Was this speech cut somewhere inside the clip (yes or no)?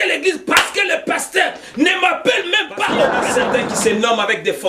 yes